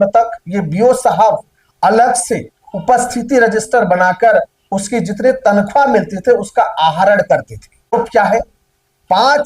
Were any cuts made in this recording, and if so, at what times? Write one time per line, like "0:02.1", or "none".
0:07.9